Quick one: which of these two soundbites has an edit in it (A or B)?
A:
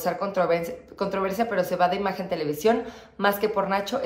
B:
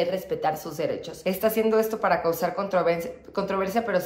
B